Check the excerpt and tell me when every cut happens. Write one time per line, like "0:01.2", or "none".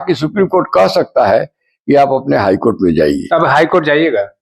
none